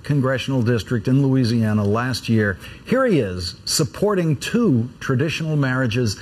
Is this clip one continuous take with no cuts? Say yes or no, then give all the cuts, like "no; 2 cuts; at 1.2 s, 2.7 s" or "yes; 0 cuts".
no; 1 cut; at 4.0 s